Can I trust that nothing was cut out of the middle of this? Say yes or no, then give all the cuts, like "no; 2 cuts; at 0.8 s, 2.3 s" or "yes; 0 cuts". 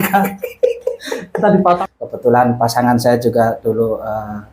no; 1 cut; at 1.8 s